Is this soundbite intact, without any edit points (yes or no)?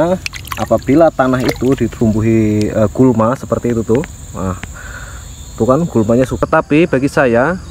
no